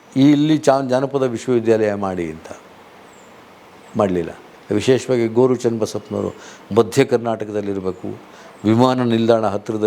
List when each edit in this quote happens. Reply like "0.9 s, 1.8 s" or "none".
4.5 s